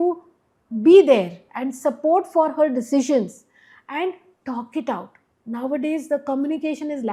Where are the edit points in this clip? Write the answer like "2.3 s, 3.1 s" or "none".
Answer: none